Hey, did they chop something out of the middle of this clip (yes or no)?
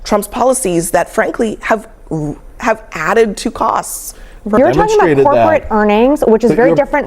yes